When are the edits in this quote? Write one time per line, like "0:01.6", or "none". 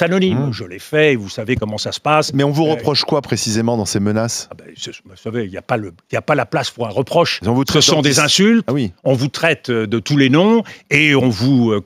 none